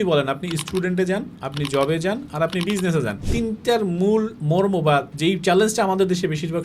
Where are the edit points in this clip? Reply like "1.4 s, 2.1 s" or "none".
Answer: 3.2 s, 4.7 s